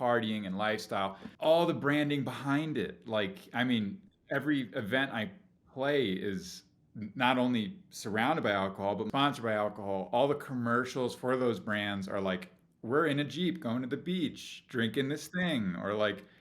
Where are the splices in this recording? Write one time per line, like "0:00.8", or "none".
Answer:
0:01.3
0:09.1